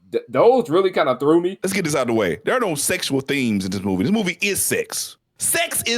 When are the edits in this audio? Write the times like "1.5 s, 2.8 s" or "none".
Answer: 1.6 s